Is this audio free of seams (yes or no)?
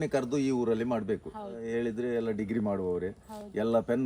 no